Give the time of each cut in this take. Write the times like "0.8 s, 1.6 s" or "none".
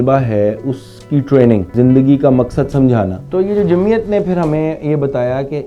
1.7 s, 3.2 s